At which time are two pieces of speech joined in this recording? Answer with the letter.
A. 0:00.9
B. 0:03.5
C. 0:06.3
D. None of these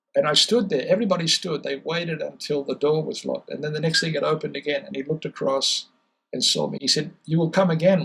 D